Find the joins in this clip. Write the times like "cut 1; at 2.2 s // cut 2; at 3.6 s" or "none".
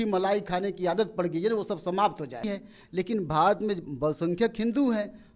cut 1; at 2.5 s